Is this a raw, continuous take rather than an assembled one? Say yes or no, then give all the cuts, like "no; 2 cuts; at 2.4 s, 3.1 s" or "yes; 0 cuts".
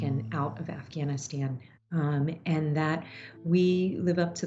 yes; 0 cuts